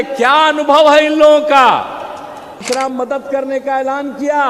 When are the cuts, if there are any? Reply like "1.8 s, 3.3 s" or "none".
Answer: 2.6 s